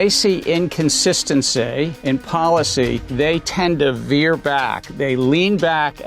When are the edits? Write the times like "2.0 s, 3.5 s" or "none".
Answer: 2.0 s, 3.1 s, 4.9 s